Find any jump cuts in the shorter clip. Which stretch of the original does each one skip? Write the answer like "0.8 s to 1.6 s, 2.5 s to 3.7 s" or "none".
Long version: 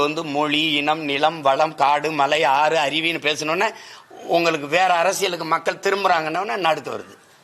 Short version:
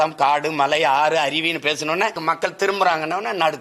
3.8 s to 5.4 s